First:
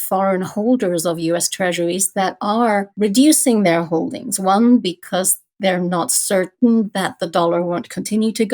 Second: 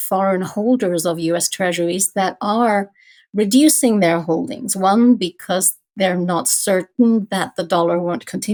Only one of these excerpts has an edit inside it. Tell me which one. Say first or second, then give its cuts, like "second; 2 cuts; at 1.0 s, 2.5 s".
first; 1 cut; at 2.9 s